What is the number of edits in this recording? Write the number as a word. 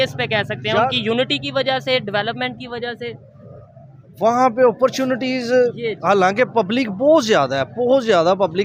zero